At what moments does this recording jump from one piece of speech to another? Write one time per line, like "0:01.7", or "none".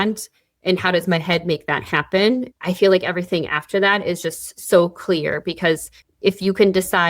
0:02.5